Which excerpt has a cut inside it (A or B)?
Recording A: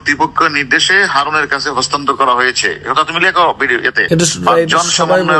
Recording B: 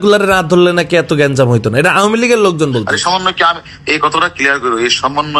A